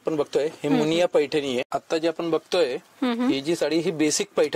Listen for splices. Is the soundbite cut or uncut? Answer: cut